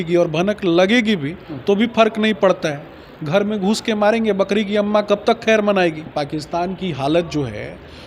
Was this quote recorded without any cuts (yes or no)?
yes